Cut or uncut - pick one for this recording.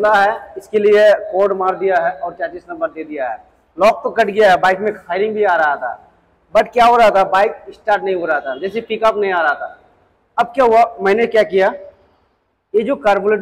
uncut